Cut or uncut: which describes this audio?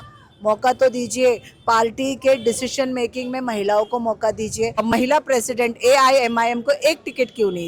cut